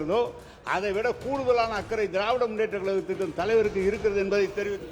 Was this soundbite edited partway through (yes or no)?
no